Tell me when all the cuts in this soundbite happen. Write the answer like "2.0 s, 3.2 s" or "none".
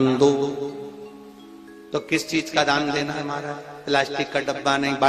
none